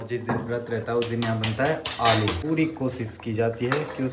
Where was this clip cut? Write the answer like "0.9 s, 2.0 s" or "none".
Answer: 2.4 s